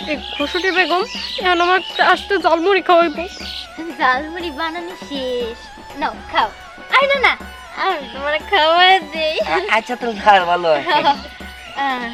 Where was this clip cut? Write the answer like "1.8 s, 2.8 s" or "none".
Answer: none